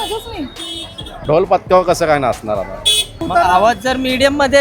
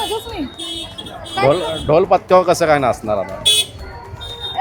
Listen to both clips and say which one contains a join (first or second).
first